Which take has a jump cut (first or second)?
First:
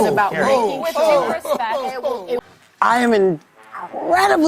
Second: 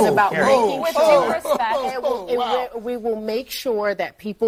first